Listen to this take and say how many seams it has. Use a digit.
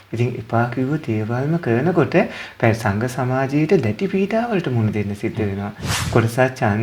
1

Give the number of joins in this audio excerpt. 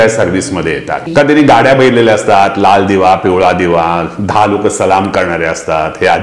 1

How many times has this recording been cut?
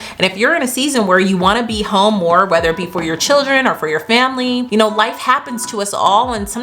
1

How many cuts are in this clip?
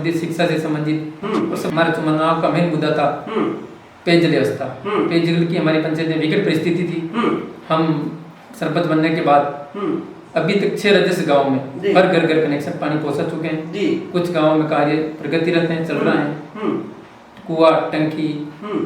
1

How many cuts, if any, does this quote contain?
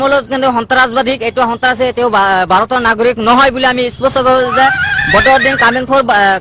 1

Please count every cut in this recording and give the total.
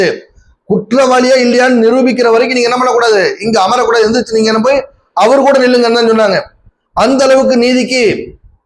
0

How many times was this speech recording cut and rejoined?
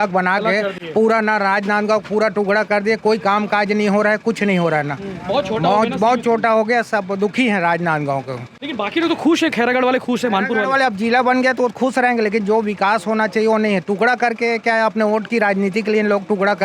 0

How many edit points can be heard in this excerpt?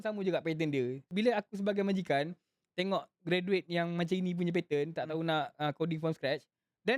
1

